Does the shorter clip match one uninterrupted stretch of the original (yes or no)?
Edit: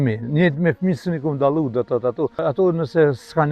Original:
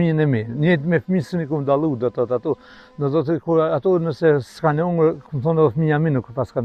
no